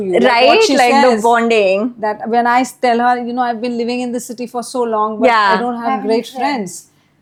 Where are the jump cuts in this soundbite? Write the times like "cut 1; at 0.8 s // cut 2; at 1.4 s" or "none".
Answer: none